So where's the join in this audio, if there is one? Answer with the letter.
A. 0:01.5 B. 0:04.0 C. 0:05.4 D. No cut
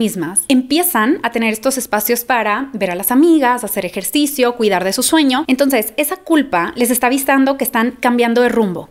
C